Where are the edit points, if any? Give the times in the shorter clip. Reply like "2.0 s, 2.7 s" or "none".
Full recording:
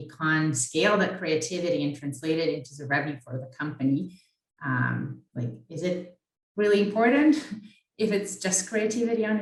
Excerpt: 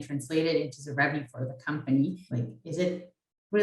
2.2 s